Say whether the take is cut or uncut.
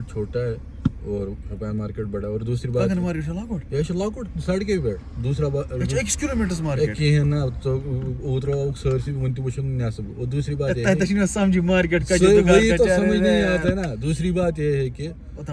uncut